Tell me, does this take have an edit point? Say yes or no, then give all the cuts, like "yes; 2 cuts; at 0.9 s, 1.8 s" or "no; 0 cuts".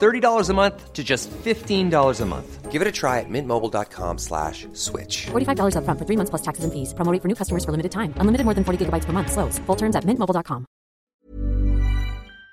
yes; 1 cut; at 11.1 s